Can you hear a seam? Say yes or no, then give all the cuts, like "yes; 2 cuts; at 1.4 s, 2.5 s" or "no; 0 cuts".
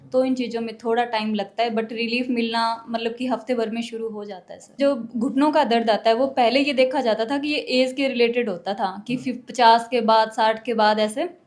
yes; 1 cut; at 4.8 s